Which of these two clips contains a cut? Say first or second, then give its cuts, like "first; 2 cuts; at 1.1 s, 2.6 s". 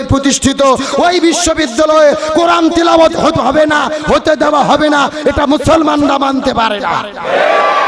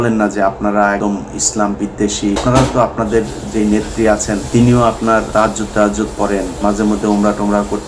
second; 5 cuts; at 1.0 s, 2.4 s, 4.4 s, 5.3 s, 6.5 s